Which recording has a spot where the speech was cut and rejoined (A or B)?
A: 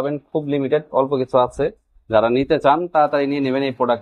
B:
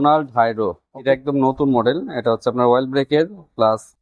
B